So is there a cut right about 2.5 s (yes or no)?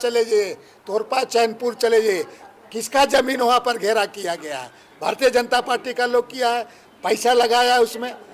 no